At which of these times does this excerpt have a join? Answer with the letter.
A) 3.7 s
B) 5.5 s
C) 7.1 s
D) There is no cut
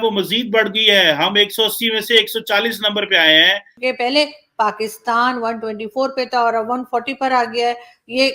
A